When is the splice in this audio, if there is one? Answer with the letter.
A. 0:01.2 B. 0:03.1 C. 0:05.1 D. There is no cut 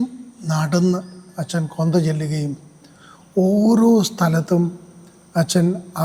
D